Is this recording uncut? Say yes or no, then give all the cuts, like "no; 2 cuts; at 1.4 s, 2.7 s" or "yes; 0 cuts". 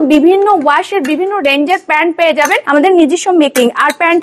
no; 1 cut; at 2.6 s